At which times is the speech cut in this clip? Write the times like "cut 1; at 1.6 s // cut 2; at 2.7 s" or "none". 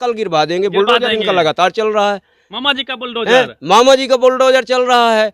none